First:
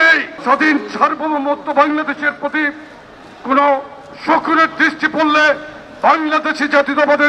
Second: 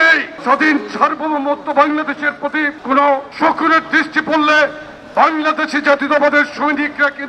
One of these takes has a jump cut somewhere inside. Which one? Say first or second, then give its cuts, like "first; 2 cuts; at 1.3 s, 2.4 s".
second; 2 cuts; at 2.8 s, 3.3 s